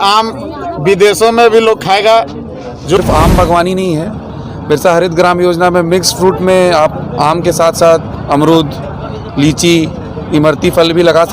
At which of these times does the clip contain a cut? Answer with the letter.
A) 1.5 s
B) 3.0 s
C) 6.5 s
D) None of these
B